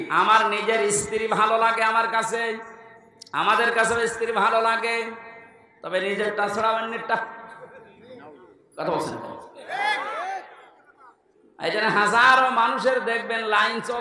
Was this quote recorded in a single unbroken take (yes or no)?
yes